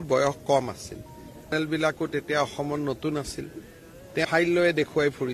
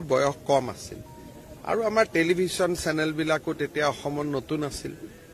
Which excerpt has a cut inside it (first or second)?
first